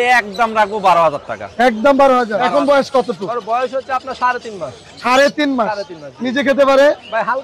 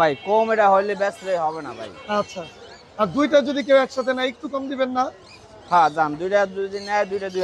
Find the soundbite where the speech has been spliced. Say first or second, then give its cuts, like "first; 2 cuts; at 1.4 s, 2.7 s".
first; 1 cut; at 2.7 s